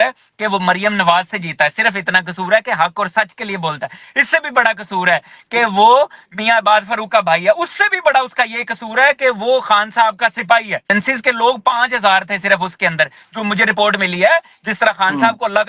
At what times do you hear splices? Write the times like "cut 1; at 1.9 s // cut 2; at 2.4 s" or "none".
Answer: cut 1; at 10.9 s

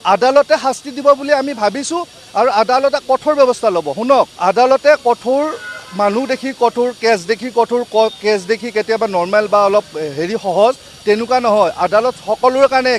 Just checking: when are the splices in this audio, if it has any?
cut 1; at 4.3 s

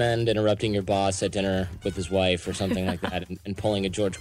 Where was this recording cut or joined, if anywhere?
none

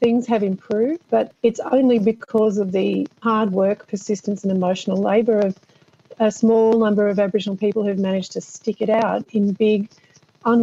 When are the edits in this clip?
cut 1; at 1.3 s // cut 2; at 3.2 s

